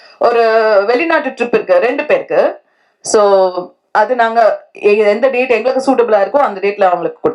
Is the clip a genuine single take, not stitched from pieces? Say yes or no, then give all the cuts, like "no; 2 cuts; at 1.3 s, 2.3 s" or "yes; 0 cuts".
yes; 0 cuts